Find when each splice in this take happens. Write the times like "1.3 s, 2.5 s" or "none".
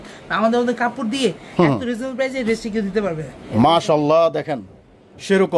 3.4 s